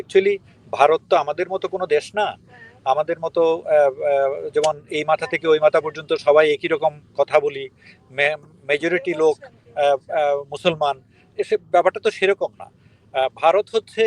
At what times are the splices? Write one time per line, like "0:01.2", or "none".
none